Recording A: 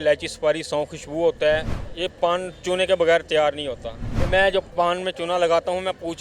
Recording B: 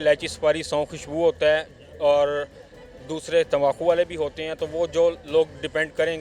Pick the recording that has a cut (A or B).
A